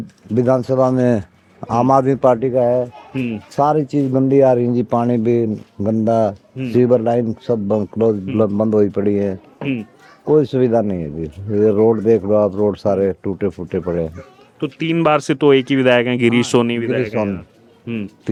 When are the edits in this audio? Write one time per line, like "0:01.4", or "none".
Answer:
none